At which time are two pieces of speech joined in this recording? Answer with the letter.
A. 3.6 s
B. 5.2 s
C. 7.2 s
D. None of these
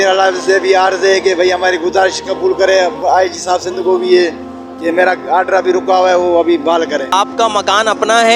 D